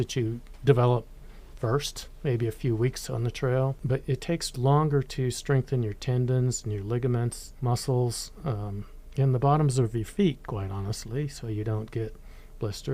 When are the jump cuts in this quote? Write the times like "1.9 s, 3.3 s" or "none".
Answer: 3.8 s, 7.5 s